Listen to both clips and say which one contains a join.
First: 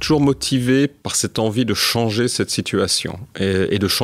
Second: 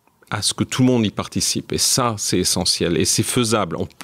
first; 1 cut; at 1.1 s

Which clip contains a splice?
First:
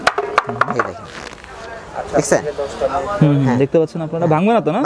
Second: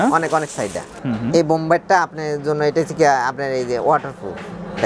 second; 1 cut; at 1.1 s

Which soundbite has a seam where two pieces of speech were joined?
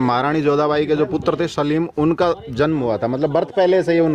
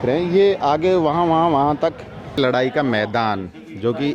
second; 1 cut; at 2.4 s

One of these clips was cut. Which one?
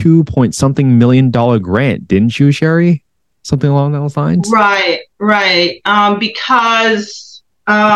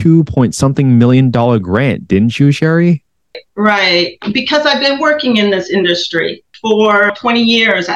second; 4 cuts; at 3.4 s, 4.2 s, 6.5 s, 7.1 s

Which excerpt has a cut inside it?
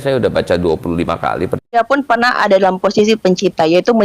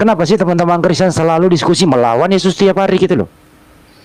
first; 1 cut; at 1.8 s

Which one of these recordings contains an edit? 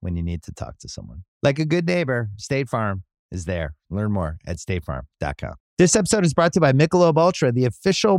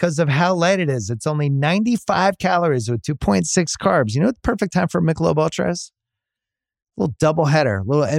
first; 1 cut; at 5.6 s

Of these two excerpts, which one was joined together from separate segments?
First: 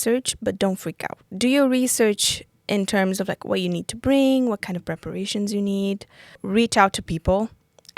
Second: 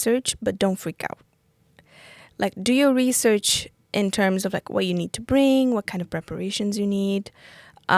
first; 2 cuts; at 1.3 s, 6.4 s

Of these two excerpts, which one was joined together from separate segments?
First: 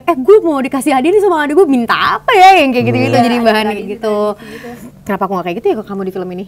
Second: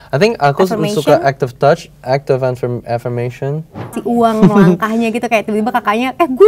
second; 1 cut; at 4.0 s

